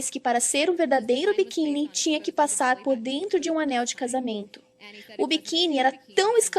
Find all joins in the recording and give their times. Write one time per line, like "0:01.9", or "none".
0:04.2